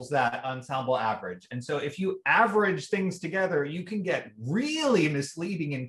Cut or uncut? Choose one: uncut